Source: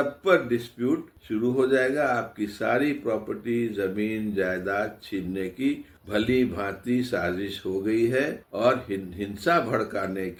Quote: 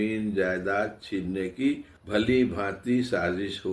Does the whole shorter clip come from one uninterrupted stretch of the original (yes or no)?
yes